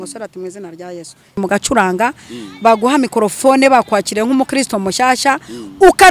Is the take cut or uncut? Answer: cut